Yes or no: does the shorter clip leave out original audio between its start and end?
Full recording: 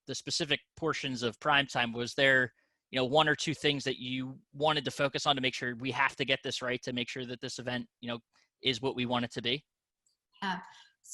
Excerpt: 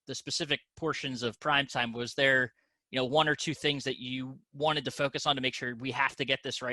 no